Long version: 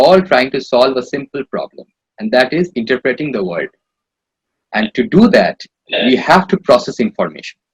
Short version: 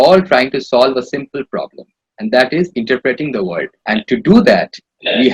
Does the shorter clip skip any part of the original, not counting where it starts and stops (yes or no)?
yes